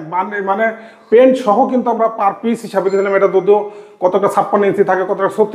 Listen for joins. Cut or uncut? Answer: uncut